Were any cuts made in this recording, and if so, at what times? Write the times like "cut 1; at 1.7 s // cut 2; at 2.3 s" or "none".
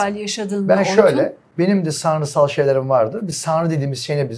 cut 1; at 1.4 s